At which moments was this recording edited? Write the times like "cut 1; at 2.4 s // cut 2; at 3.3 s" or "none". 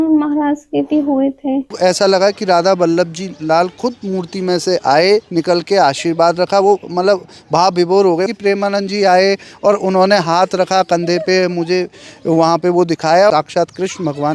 cut 1; at 1.8 s // cut 2; at 8.2 s // cut 3; at 13.3 s